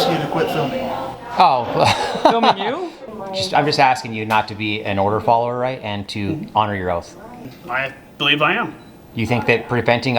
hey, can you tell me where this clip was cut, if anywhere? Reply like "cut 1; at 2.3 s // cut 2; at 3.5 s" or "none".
cut 1; at 2.9 s // cut 2; at 7.4 s